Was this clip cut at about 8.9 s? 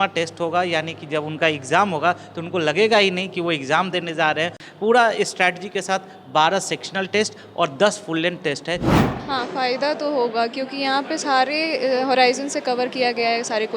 yes; 2 cuts; at 4.6 s, 8.9 s

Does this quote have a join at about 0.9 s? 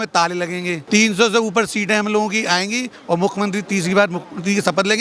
no; 0 cuts

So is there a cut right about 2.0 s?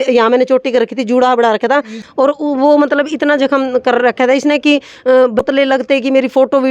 yes; 2 cuts; at 2.0 s, 5.4 s

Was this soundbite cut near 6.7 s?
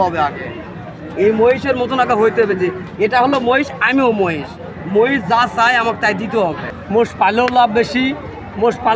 yes; 1 cut; at 6.7 s

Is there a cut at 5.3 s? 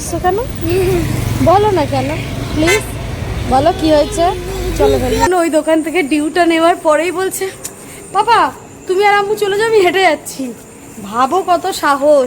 yes; 1 cut; at 5.3 s

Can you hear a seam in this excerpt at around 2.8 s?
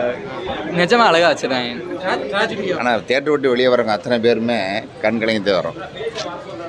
yes; 1 cut; at 2.8 s

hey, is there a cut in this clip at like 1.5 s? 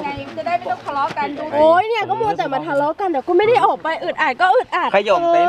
yes; 1 cut; at 1.5 s

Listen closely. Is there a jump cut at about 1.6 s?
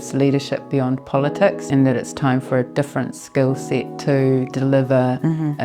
yes; 1 cut; at 1.6 s

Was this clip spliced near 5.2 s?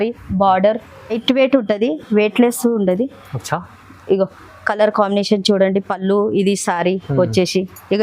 no; 1 cut; at 1.2 s

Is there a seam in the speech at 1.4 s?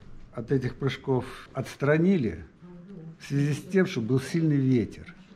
yes; 1 cut; at 1.4 s

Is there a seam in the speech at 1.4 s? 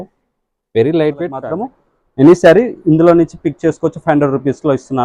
yes; 1 cut; at 1.4 s

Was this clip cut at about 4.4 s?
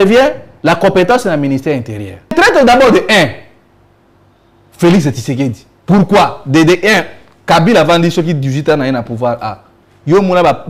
no; 1 cut; at 2.3 s

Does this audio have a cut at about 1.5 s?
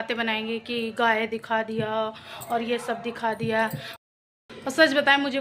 no; 1 cut; at 3.9 s

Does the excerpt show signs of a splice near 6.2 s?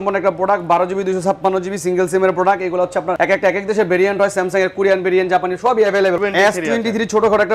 yes; 2 cuts; at 3.1 s, 6.2 s

